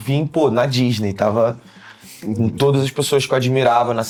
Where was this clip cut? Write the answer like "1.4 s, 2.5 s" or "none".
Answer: none